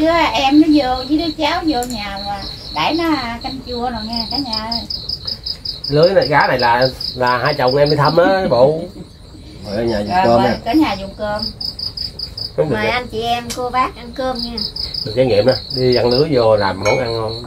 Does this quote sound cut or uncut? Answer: uncut